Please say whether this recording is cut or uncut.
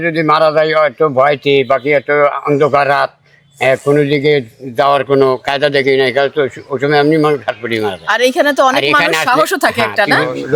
uncut